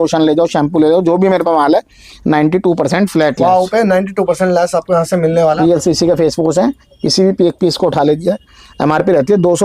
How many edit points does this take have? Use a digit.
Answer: 1